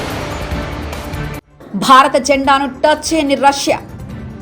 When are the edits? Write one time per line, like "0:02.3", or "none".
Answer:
0:01.4